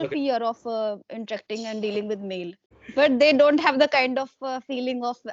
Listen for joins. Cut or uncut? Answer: cut